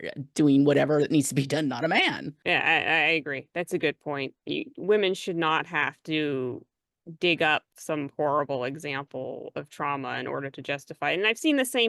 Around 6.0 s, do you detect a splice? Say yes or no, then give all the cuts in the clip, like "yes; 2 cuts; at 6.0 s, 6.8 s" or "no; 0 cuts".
no; 2 cuts; at 2.3 s, 7.7 s